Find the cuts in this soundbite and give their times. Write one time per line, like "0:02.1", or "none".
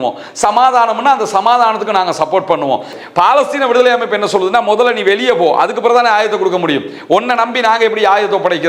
0:02.9